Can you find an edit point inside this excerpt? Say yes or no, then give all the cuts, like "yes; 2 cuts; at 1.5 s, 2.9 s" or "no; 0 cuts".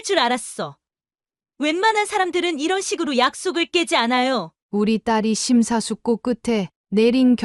yes; 1 cut; at 4.6 s